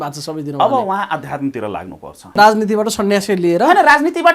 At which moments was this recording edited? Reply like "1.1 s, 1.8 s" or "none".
2.3 s

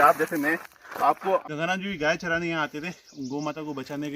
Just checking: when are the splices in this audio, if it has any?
1.4 s

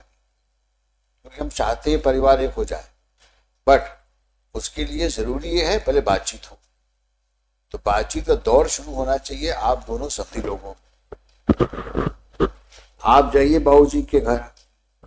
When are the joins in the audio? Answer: none

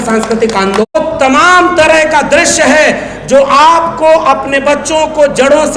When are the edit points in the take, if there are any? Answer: 0.9 s

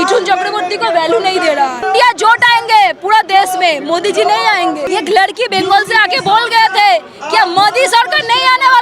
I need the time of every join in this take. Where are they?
1.8 s, 4.8 s

